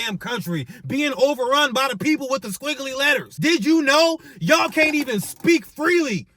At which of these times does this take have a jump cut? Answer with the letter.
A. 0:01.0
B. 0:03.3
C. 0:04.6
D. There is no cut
B